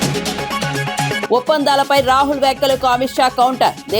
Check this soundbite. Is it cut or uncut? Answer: cut